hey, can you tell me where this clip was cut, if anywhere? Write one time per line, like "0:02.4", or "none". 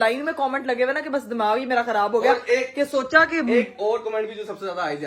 none